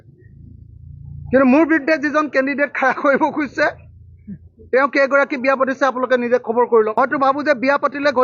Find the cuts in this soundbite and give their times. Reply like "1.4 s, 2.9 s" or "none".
7.0 s